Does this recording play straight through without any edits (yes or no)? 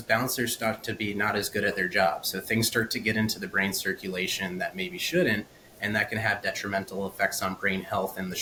yes